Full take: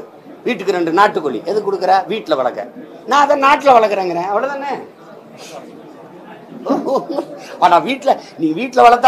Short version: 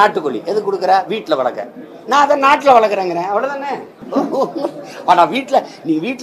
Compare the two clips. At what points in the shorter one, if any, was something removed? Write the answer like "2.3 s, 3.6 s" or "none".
3.9 s